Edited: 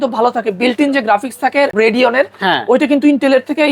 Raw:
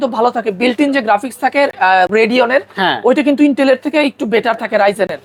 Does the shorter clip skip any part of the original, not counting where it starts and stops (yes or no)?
yes